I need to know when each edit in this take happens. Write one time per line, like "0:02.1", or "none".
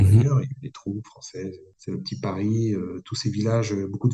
0:01.7

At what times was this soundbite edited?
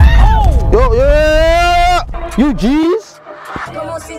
0:02.1

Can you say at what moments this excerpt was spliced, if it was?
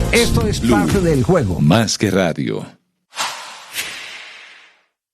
0:03.0

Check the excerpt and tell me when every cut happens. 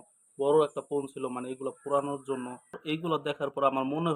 0:02.8

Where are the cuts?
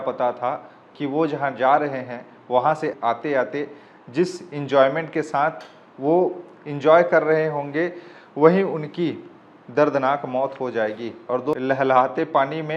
0:02.9
0:11.6

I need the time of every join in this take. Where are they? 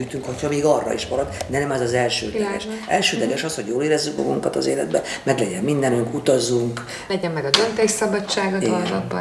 0:06.9

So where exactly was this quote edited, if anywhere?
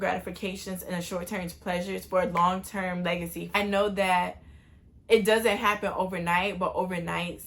0:03.6

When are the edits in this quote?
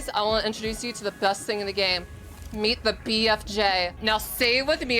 0:03.9

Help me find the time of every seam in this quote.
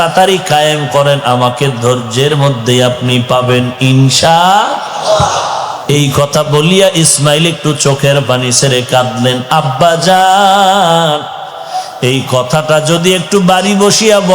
0:05.7

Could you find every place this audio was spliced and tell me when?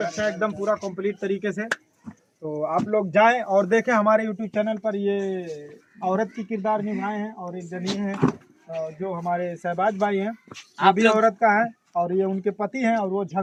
none

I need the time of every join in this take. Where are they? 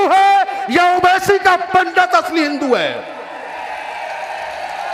none

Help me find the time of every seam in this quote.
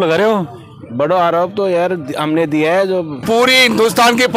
0:03.2

